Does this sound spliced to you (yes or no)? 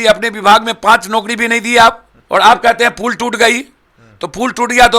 yes